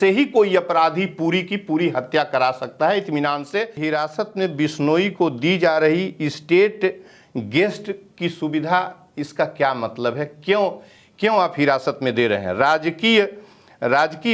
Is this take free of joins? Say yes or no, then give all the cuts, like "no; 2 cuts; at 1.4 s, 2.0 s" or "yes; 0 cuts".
no; 1 cut; at 3.8 s